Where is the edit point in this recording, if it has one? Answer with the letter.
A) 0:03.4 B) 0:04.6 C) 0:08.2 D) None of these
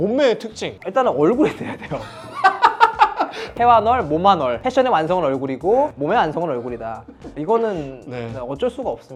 D